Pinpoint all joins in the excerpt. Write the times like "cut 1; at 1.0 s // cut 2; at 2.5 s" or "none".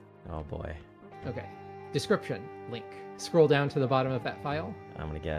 cut 1; at 1.0 s // cut 2; at 3.1 s